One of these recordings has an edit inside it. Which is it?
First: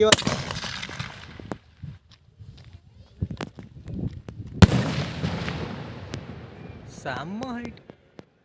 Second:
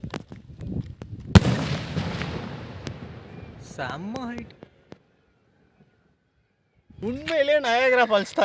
second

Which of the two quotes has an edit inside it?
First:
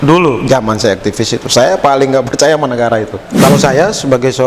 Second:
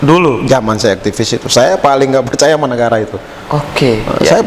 first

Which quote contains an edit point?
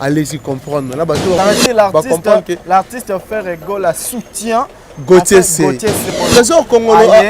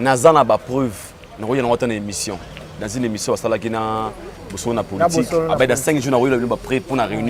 first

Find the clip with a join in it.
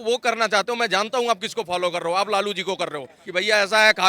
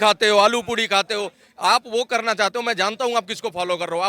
first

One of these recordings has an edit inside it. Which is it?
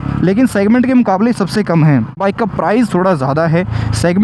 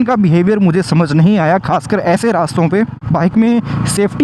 second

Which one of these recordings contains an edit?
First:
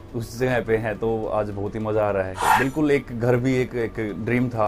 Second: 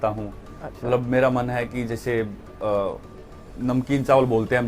first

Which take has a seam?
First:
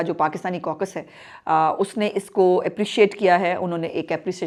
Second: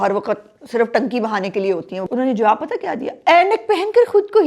second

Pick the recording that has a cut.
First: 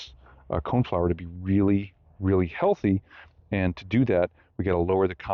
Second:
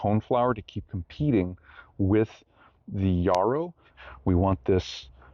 second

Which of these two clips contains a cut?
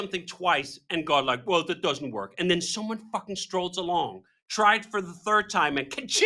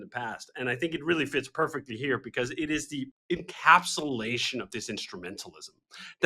second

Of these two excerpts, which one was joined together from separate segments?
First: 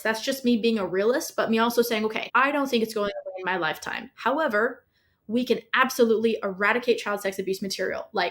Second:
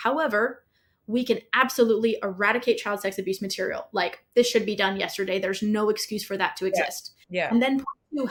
first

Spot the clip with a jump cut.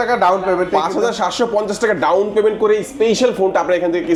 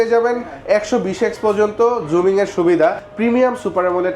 second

